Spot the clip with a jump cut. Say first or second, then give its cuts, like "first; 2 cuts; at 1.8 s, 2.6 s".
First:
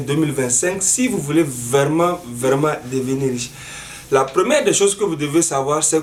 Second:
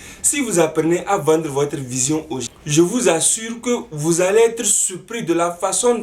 second; 1 cut; at 2.4 s